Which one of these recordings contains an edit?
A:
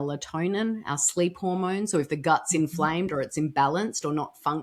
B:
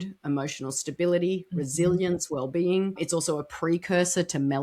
B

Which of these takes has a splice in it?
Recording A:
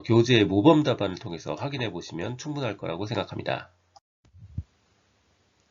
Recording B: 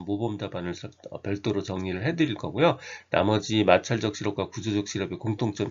B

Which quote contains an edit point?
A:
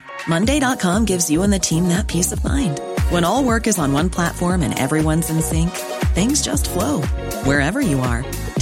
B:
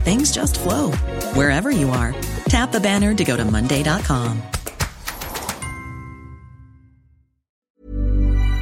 B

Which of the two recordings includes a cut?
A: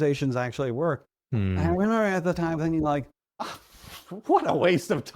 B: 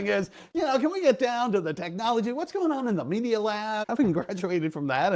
B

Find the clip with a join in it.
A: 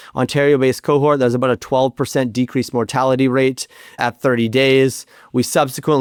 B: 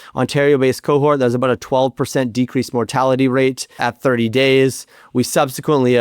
B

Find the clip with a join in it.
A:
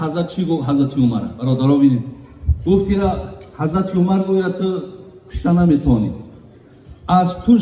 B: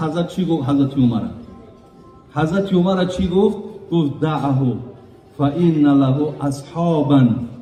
A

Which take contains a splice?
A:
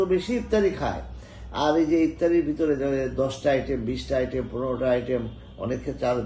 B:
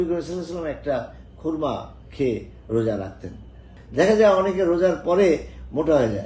B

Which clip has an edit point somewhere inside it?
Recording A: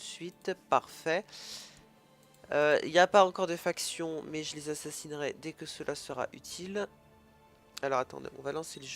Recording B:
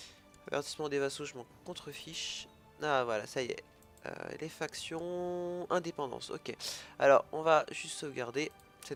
A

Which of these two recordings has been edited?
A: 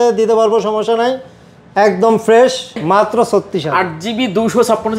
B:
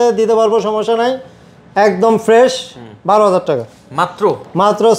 A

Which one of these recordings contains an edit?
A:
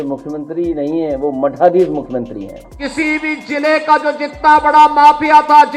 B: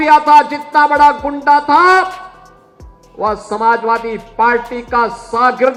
A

